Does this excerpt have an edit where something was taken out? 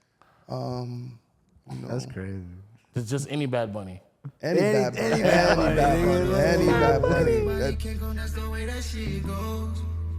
yes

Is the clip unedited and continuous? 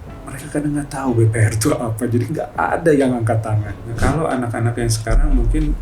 no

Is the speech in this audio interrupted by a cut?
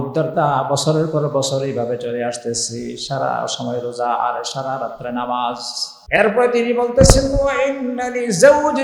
yes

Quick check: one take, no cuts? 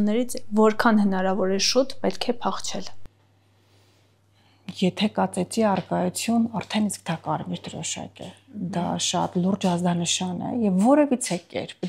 yes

